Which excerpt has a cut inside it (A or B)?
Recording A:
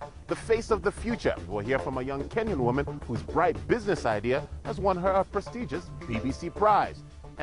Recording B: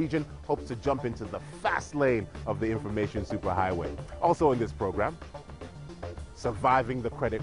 A